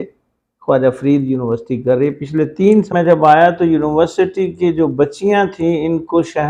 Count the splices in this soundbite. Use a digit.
1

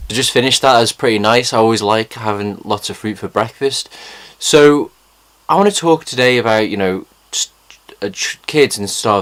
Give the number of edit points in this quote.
0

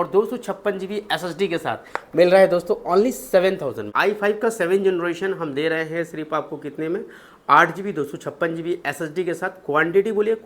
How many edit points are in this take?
1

